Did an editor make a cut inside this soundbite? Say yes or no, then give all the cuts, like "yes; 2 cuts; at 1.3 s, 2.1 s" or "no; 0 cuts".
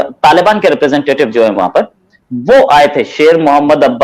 no; 0 cuts